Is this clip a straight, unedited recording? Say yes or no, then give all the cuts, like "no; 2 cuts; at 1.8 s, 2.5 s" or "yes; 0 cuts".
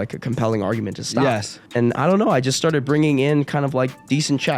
no; 1 cut; at 1.6 s